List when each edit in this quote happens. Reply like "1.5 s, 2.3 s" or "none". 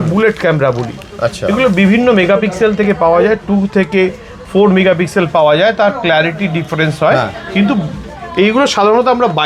none